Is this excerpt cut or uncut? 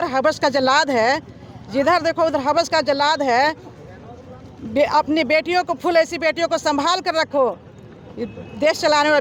uncut